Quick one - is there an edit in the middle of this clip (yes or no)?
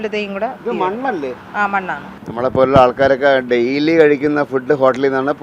yes